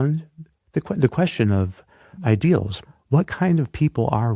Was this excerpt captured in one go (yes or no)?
no